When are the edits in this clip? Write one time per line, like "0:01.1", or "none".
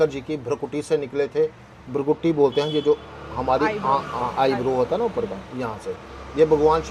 none